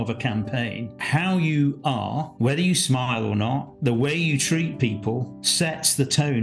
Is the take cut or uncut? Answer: cut